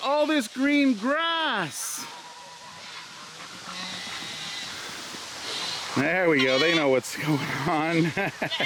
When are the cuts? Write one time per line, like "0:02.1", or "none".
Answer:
none